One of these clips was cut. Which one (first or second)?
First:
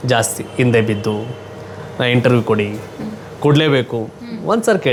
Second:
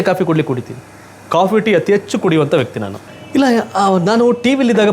second